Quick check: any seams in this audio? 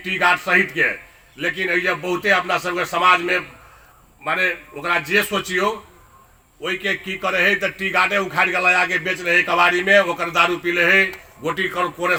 no; 0 cuts

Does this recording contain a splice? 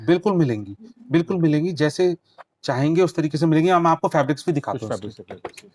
no; 0 cuts

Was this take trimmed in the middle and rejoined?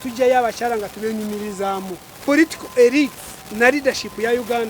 yes; 1 cut; at 2.1 s

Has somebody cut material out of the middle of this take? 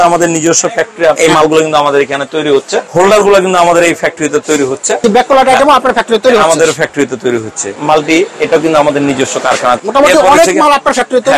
yes; 5 cuts; at 1.2 s, 2.9 s, 5.0 s, 7.7 s, 9.8 s

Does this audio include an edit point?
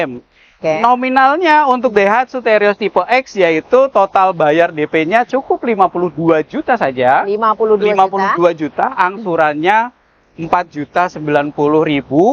no; 0 cuts

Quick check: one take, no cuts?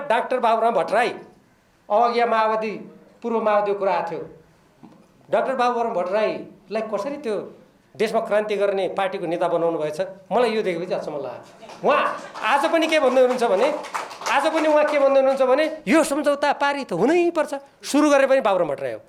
yes; 0 cuts

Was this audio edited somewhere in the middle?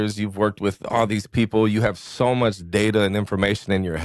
no; 0 cuts

